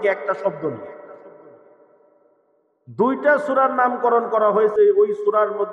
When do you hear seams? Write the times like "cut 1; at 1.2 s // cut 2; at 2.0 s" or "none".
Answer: cut 1; at 4.7 s